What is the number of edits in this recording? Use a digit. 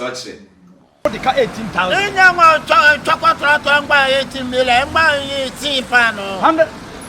1